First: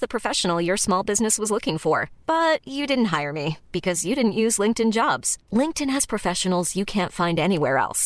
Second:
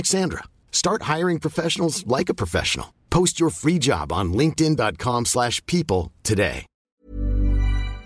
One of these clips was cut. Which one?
second; 1 cut; at 7.0 s

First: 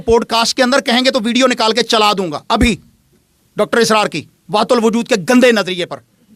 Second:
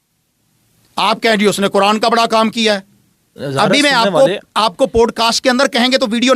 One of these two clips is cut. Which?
second; 1 cut; at 3.4 s

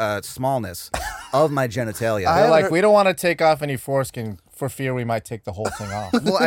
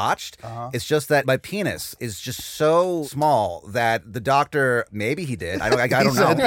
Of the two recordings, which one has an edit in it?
second; 2 cuts; at 1.2 s, 3.1 s

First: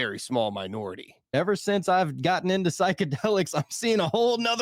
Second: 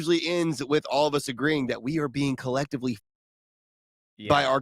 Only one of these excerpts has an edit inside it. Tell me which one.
first; 1 cut; at 1.3 s

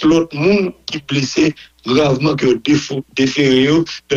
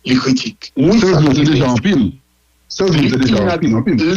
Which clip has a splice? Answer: second; 1 cut; at 0.9 s

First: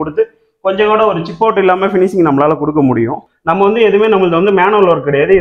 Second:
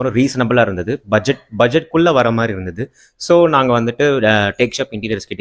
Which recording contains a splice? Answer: first; 1 cut; at 3.3 s

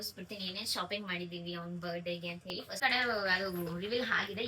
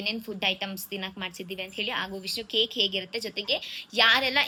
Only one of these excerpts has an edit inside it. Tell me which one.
first; 1 cut; at 2.8 s

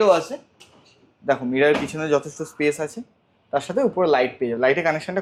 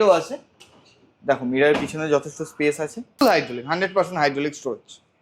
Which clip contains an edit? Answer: second; 1 cut; at 3.2 s

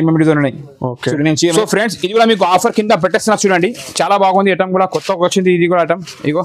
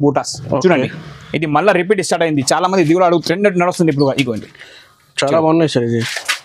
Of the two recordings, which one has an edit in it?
first; 1 cut; at 1.5 s

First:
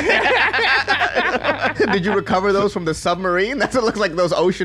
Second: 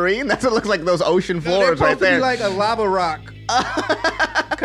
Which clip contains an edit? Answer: first; 1 cut; at 1.7 s

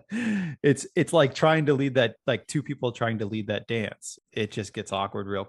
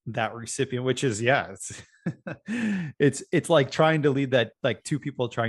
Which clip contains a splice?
first; 1 cut; at 4.1 s

